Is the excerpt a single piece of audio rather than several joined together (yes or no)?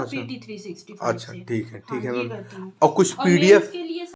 yes